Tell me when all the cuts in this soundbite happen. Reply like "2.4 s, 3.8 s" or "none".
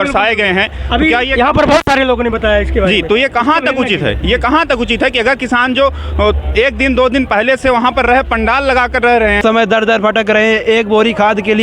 9.4 s